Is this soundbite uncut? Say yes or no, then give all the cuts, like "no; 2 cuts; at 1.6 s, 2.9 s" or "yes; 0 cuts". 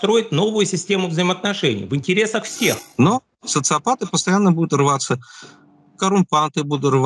no; 1 cut; at 2.8 s